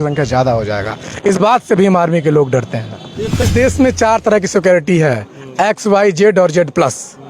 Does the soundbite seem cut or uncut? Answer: cut